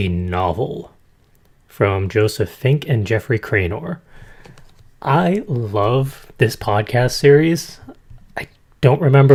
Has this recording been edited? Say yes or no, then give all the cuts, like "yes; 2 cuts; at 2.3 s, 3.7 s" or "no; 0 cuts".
no; 0 cuts